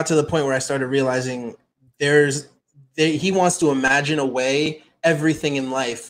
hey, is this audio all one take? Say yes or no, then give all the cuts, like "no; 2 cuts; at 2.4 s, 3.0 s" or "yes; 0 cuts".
yes; 0 cuts